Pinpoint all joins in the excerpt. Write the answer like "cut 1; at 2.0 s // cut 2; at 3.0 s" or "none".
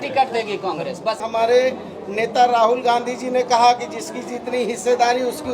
cut 1; at 1.2 s